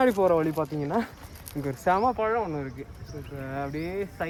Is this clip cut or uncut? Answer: uncut